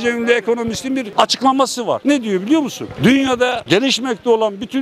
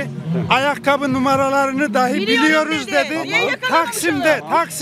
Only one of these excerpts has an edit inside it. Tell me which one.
first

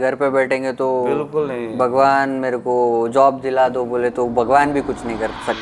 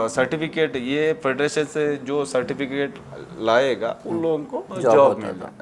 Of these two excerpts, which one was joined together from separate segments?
second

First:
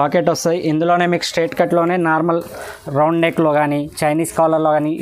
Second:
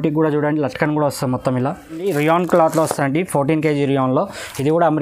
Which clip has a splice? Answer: second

